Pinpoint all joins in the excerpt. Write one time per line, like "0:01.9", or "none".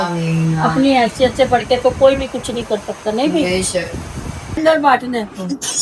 0:04.6